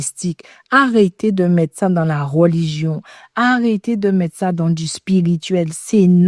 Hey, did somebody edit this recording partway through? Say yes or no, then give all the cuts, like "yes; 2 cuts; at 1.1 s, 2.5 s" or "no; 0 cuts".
no; 0 cuts